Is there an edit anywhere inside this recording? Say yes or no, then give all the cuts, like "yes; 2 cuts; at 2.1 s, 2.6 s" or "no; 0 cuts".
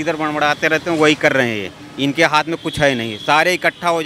no; 0 cuts